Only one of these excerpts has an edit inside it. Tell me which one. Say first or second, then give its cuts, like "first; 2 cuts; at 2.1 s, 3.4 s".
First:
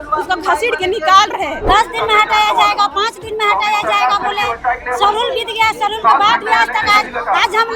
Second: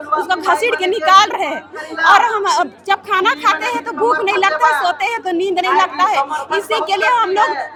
first; 1 cut; at 1.6 s